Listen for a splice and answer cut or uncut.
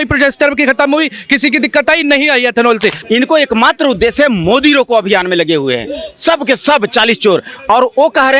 cut